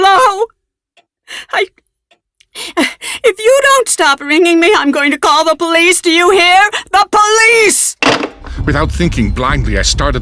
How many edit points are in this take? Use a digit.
1